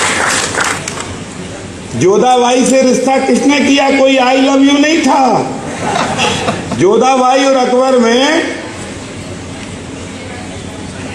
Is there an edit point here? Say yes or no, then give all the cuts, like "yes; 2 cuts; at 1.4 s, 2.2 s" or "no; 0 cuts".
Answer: no; 0 cuts